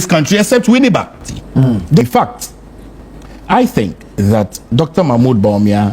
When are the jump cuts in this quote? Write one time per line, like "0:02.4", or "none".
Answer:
0:02.0